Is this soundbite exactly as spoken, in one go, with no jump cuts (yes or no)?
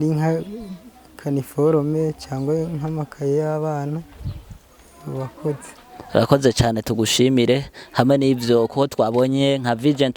yes